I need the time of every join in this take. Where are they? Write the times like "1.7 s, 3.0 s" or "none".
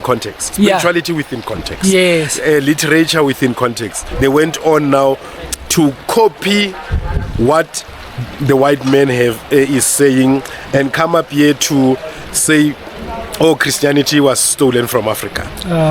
4.0 s